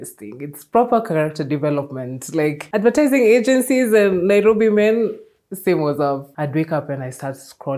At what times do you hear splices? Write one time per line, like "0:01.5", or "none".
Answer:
0:02.6
0:06.3